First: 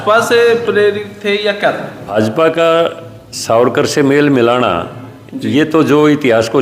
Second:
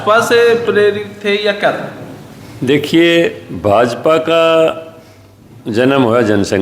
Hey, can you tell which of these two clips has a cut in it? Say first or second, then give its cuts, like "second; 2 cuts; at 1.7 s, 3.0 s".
first; 1 cut; at 2.3 s